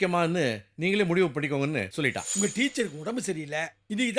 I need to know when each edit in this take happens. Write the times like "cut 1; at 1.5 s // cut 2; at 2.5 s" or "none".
cut 1; at 2.2 s